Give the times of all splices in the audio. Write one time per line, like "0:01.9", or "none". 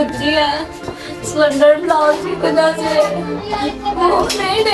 none

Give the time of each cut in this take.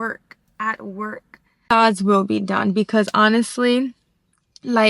0:01.7

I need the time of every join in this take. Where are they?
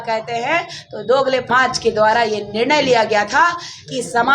0:01.5

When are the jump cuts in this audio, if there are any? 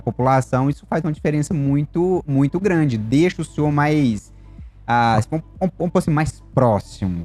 none

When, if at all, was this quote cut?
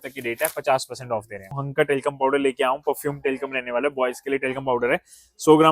0:01.6

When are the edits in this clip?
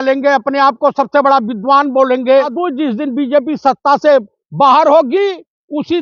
0:02.6

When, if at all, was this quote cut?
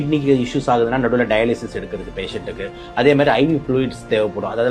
none

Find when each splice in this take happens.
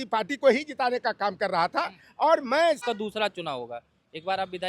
0:02.8

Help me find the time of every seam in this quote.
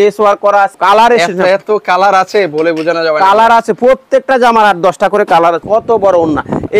0:00.8
0:05.6

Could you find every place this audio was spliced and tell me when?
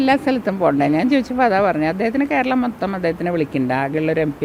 none

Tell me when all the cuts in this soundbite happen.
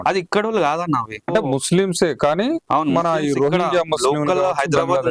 0:01.3

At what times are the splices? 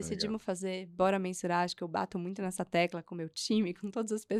none

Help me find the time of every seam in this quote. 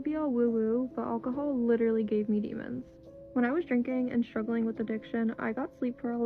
none

